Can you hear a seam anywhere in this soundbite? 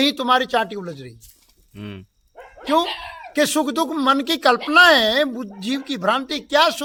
no; 0 cuts

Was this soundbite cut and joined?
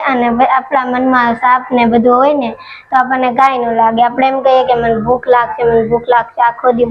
no; 0 cuts

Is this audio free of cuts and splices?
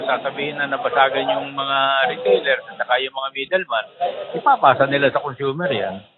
yes; 0 cuts

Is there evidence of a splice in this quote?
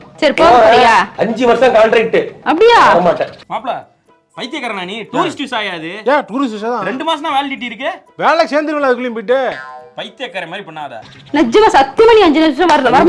no; 0 cuts

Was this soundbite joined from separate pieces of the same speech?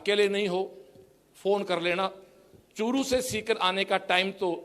no; 0 cuts

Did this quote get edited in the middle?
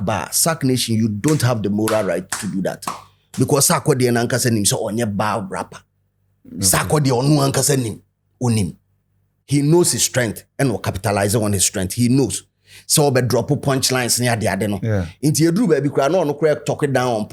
no; 0 cuts

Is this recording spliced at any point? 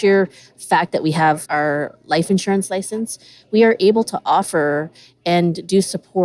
yes; 1 cut; at 1.4 s

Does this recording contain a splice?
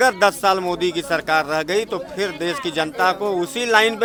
no; 0 cuts

